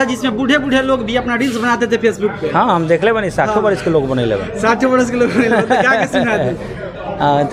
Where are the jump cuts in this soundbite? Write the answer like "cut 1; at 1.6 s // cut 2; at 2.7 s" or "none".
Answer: none